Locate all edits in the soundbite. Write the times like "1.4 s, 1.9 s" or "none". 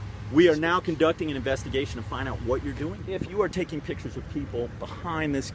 3.0 s